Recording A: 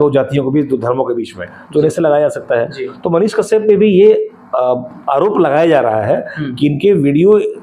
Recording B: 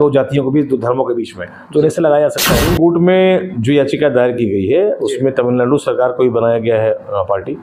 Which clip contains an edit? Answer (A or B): B